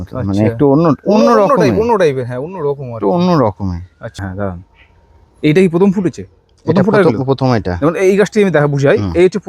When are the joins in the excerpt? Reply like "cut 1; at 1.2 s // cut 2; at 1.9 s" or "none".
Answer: cut 1; at 4.2 s